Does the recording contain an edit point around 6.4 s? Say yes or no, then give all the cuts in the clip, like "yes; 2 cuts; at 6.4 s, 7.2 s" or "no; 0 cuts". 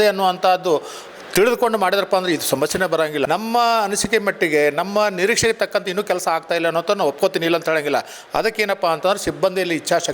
no; 1 cut; at 3.2 s